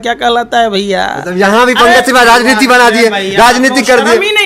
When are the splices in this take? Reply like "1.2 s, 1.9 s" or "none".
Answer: none